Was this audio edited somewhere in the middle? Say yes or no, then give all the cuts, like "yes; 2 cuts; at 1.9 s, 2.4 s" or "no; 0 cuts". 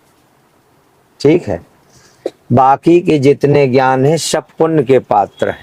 no; 0 cuts